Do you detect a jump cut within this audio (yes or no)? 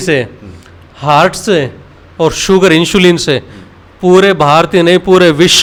no